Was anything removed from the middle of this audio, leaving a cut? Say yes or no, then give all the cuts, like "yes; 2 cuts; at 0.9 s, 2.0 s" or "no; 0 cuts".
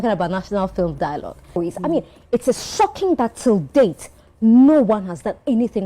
yes; 1 cut; at 1.6 s